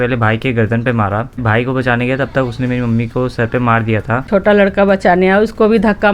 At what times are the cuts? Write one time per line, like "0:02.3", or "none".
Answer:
0:01.4
0:04.3